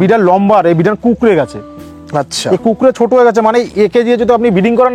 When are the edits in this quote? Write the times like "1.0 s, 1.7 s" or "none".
none